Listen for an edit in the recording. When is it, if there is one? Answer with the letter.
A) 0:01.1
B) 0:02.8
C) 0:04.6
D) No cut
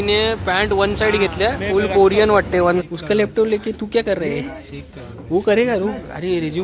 B